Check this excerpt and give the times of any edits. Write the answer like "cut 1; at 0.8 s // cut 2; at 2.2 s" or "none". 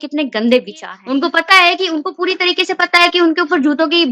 cut 1; at 0.9 s